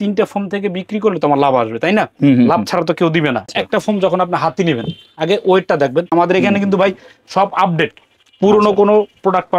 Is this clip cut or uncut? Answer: cut